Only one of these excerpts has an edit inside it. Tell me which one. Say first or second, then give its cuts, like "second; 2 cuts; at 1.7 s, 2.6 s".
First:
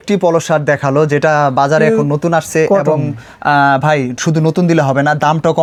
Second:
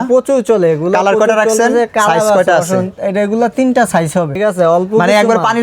second; 1 cut; at 4.3 s